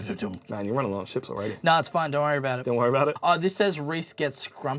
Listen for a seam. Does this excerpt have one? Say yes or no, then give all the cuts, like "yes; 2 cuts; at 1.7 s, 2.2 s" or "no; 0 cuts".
yes; 1 cut; at 3.1 s